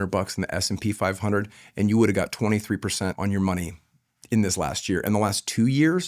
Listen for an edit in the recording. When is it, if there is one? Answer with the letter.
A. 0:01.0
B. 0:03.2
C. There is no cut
B